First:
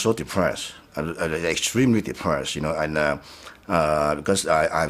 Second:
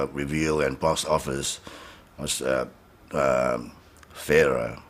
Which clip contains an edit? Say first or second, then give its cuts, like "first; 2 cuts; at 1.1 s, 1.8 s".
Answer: second; 1 cut; at 1.3 s